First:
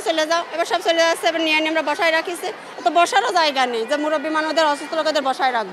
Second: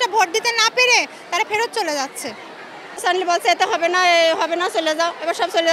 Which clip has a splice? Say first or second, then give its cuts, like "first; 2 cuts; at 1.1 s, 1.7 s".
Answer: second; 1 cut; at 3.0 s